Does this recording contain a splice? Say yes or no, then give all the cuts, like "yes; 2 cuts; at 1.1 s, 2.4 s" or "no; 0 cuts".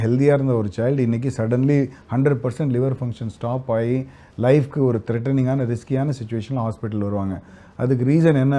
no; 0 cuts